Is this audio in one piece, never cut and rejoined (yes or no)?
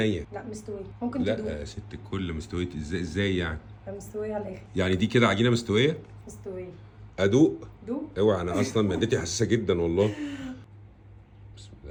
yes